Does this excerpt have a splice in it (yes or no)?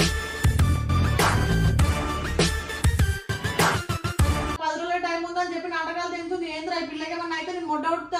yes